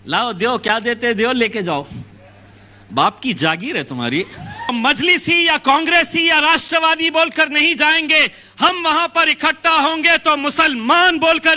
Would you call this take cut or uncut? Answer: cut